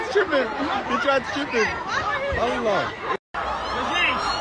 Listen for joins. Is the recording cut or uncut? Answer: cut